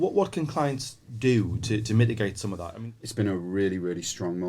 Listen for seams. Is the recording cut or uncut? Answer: cut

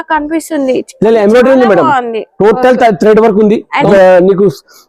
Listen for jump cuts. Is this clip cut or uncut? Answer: cut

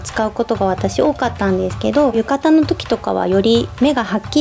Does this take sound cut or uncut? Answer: cut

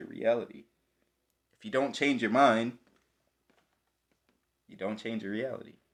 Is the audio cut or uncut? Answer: uncut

